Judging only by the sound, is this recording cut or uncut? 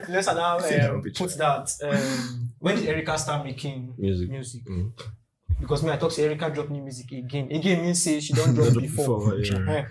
cut